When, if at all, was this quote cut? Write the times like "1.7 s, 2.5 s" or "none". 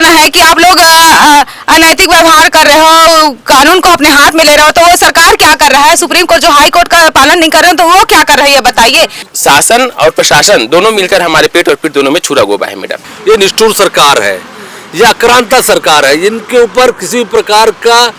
9.2 s, 13.1 s